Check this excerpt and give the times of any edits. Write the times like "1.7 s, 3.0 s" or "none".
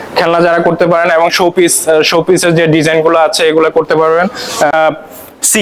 4.7 s